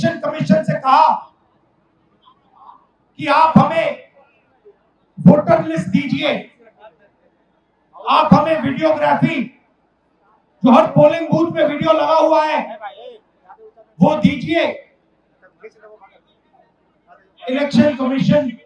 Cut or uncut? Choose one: uncut